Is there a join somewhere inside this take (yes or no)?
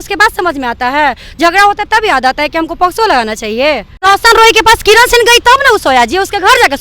yes